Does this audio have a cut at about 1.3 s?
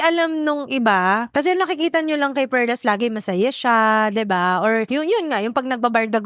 yes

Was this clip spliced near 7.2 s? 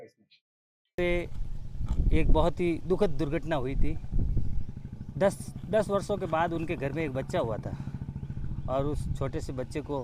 no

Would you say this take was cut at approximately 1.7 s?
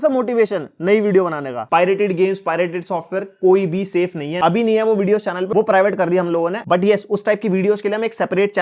yes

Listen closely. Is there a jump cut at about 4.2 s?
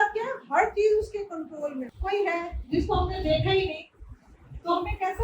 no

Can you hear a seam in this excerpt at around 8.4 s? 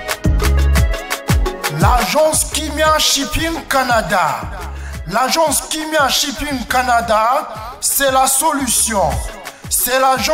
no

